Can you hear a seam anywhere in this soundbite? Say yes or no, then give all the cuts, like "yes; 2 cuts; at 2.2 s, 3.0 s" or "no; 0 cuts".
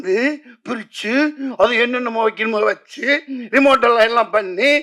no; 0 cuts